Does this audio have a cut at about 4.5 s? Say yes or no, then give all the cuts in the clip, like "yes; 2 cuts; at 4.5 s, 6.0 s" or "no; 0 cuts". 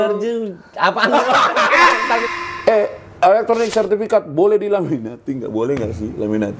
no; 1 cut; at 2.2 s